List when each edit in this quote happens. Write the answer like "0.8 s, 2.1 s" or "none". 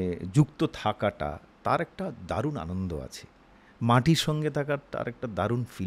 none